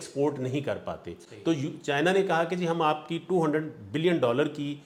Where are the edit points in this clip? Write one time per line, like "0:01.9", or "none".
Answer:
none

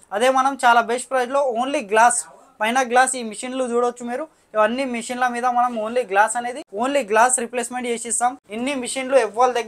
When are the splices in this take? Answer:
0:06.6
0:08.4

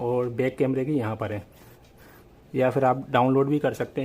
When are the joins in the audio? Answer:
0:01.8

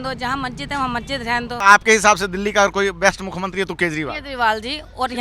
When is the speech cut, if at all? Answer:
0:01.6

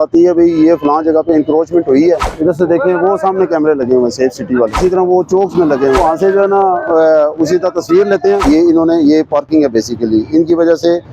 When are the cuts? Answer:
0:02.3
0:04.8
0:06.0
0:08.4

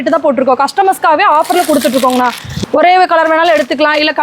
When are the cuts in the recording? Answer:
0:02.5

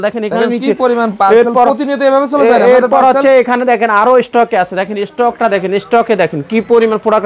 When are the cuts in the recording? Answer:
none

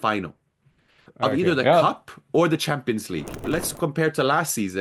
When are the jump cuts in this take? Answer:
0:03.5

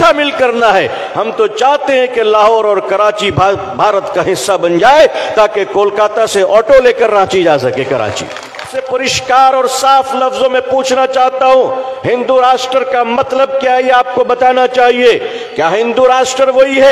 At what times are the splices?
0:08.8

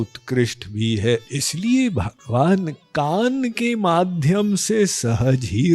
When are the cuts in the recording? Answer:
0:01.4

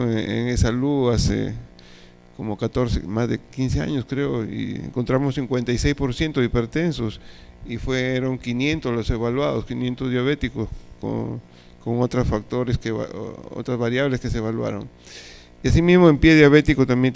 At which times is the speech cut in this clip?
0:14.2

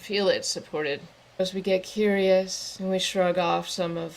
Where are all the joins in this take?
0:01.2
0:02.6

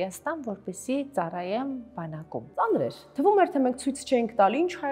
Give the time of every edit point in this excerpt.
0:02.6

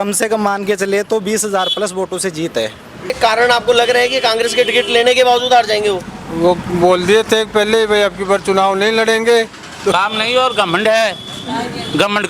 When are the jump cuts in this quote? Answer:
0:03.2
0:09.9

